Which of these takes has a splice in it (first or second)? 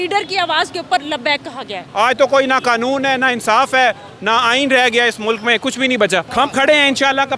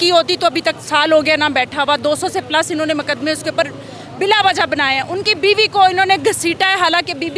first